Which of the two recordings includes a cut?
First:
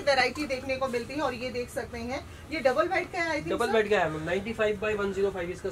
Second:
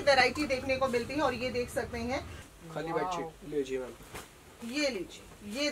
second; 1 cut; at 2.4 s

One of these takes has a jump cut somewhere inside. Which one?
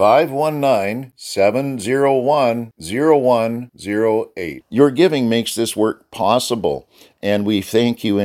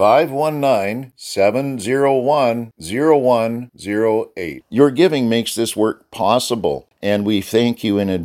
second; 1 cut; at 6.9 s

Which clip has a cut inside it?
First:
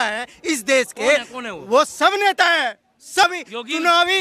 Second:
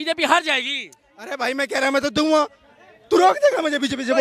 first; 1 cut; at 3.2 s

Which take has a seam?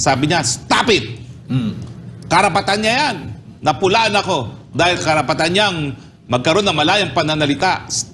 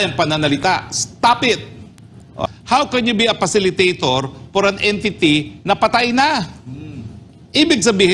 second; 1 cut; at 2.4 s

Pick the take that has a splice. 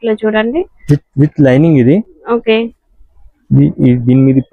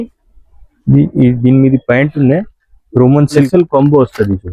second; 1 cut; at 3.4 s

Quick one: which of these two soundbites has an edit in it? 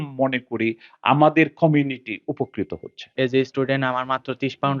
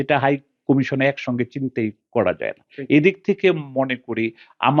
first; 1 cut; at 3.0 s

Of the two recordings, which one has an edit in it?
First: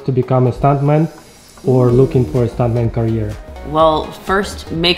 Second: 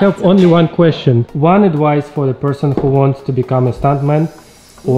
second; 1 cut; at 1.3 s

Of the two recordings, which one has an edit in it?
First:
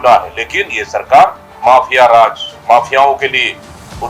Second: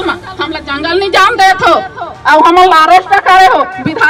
first; 1 cut; at 1.5 s

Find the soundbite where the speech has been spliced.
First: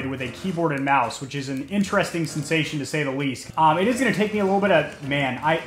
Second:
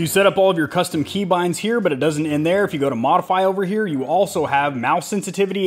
first; 1 cut; at 3.4 s

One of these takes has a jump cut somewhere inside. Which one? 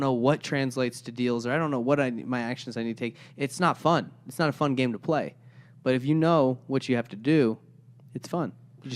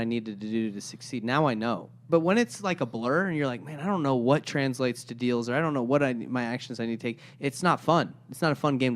second; 1 cut; at 2.0 s

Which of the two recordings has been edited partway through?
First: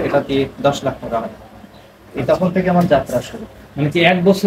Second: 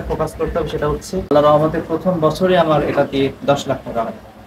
second; 1 cut; at 1.3 s

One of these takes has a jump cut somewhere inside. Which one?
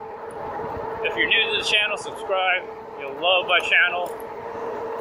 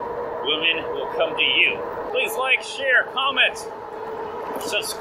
second; 1 cut; at 2.1 s

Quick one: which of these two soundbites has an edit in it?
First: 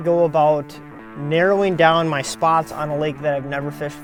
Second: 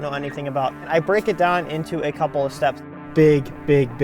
second; 2 cuts; at 0.9 s, 2.8 s

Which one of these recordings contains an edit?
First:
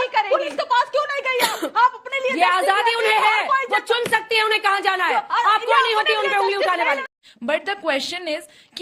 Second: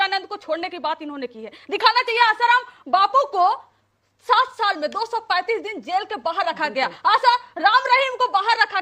first; 1 cut; at 7.0 s

